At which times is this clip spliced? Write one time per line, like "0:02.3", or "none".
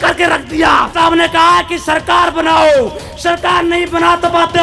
0:00.9